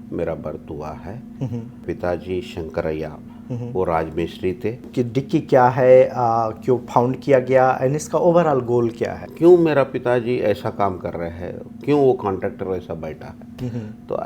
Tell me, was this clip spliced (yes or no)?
yes